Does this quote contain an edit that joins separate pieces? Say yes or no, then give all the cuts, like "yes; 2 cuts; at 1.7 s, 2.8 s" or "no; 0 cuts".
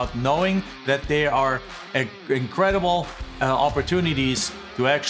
no; 0 cuts